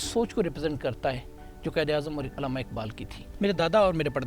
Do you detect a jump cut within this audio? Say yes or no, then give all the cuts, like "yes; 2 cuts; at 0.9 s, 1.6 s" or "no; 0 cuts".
yes; 1 cut; at 3.2 s